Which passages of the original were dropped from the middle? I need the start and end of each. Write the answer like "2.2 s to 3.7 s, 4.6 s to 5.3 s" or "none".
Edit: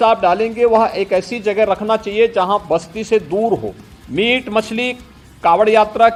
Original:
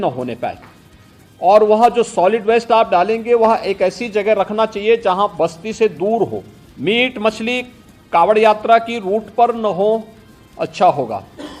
none